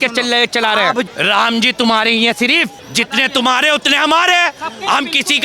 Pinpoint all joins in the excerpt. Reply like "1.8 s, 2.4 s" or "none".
1.1 s